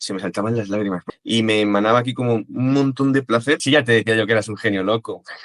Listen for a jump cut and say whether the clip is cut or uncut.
cut